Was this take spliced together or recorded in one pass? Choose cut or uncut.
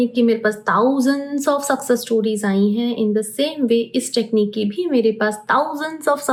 uncut